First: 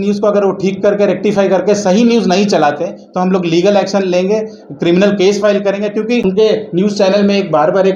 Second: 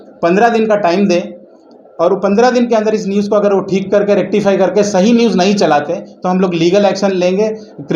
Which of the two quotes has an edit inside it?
first; 1 cut; at 6.2 s

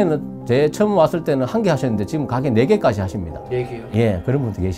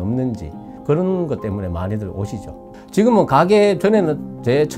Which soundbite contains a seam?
second; 1 cut; at 2.7 s

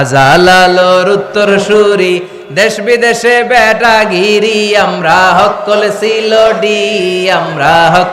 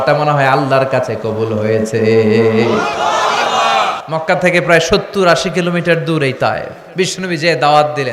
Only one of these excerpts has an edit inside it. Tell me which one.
second; 2 cuts; at 4.0 s, 6.8 s

